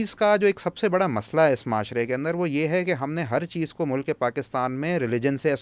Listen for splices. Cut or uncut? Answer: uncut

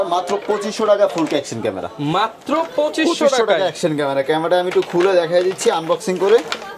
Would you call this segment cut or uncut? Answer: uncut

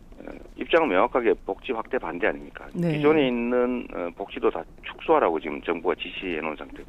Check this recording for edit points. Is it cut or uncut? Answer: cut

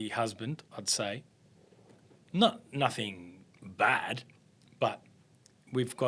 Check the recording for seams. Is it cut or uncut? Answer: uncut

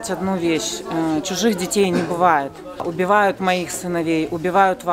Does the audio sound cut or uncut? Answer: cut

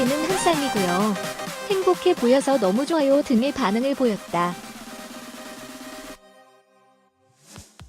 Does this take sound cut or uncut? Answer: cut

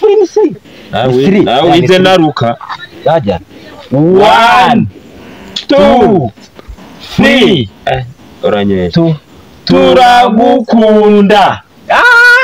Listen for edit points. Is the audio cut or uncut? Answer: uncut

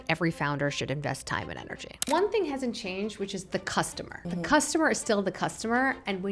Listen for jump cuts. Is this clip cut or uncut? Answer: cut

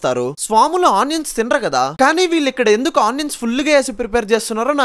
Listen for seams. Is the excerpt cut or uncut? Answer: uncut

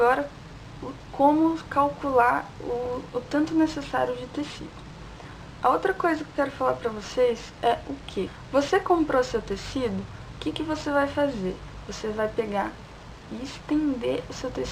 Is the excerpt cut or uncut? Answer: cut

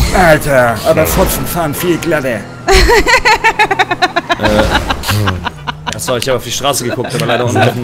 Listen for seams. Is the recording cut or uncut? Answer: uncut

